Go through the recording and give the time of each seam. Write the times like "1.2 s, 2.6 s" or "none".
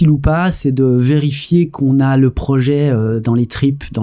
none